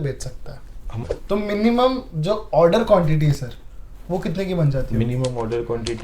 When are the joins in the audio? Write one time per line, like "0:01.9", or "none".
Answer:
0:01.0